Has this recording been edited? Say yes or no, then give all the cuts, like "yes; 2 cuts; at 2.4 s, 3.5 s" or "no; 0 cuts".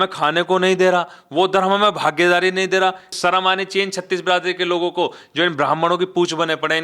yes; 1 cut; at 3.1 s